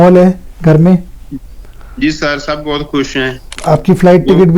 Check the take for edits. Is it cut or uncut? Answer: cut